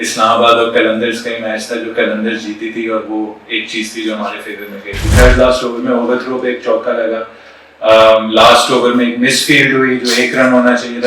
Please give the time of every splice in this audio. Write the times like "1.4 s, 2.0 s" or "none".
5.1 s